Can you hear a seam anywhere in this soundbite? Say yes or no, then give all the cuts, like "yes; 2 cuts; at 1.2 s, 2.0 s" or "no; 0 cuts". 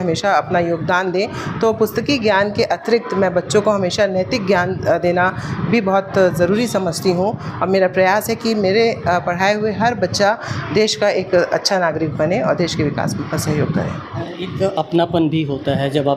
no; 0 cuts